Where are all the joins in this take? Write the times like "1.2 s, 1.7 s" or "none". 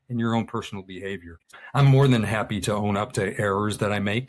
1.6 s